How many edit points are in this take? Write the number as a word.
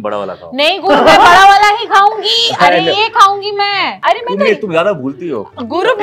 one